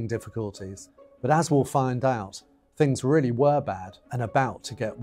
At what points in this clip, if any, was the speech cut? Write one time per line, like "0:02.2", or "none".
0:02.9